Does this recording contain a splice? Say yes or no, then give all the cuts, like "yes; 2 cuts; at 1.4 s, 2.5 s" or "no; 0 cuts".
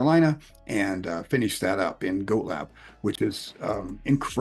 no; 0 cuts